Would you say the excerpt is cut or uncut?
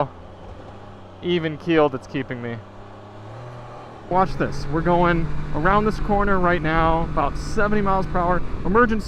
cut